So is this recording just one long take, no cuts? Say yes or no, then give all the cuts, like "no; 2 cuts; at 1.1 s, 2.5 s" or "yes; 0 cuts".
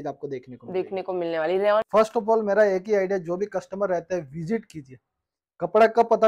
no; 1 cut; at 1.9 s